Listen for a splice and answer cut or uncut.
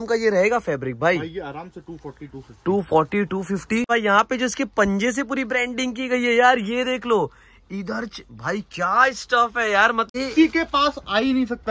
cut